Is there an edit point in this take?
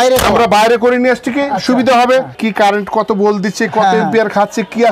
yes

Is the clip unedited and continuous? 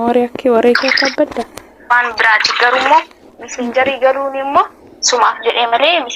no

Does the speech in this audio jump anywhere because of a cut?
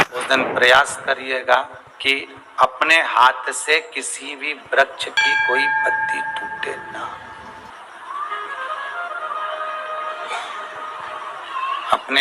yes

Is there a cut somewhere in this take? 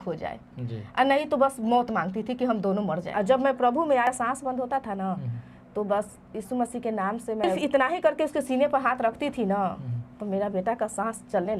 yes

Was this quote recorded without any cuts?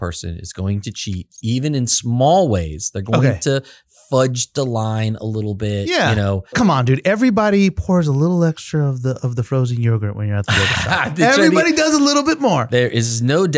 no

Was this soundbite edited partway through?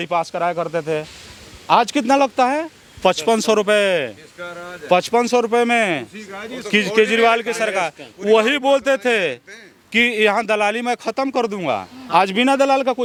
no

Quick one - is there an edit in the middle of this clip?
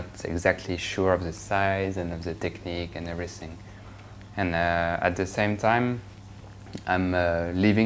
yes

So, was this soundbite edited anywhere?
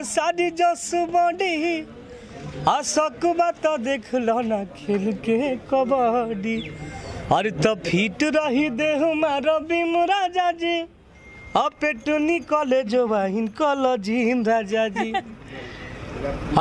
no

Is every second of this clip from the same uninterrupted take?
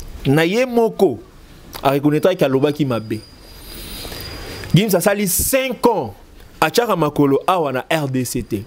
yes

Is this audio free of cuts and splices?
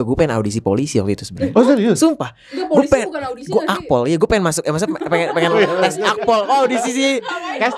yes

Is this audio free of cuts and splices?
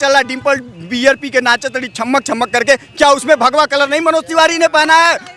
yes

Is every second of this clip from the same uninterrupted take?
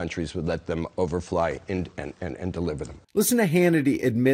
yes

